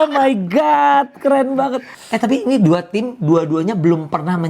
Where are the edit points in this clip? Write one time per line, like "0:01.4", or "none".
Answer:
0:02.0